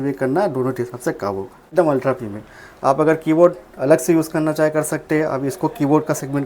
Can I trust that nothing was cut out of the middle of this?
no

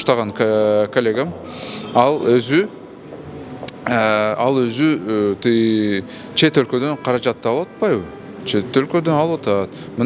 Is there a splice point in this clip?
no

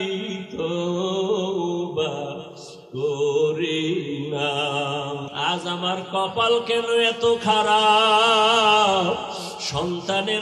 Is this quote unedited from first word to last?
no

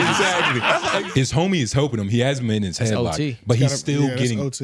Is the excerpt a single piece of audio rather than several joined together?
no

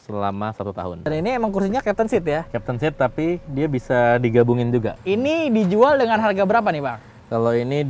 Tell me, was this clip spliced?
yes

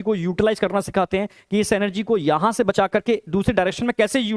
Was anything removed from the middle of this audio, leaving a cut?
no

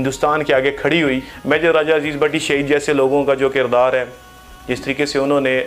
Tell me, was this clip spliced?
yes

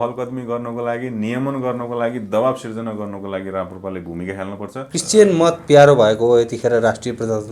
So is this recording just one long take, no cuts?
no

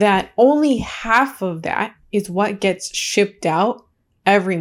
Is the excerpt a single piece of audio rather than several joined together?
yes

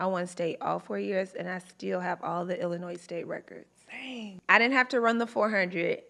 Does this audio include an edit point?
yes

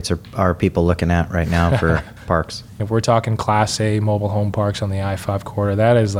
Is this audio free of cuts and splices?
no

